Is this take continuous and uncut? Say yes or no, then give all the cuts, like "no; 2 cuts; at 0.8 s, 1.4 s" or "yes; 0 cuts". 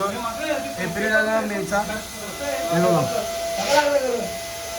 yes; 0 cuts